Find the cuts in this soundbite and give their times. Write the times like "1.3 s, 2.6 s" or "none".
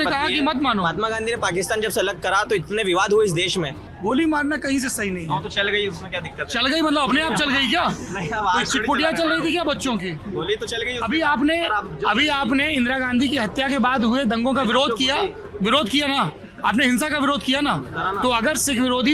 3.8 s